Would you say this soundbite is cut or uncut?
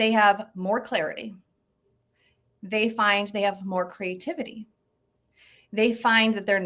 uncut